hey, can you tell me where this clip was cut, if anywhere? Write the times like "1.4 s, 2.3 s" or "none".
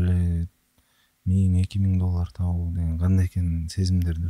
none